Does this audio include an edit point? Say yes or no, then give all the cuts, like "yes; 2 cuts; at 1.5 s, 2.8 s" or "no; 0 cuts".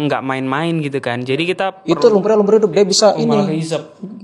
yes; 1 cut; at 1.7 s